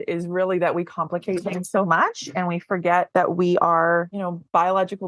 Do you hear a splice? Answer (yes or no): yes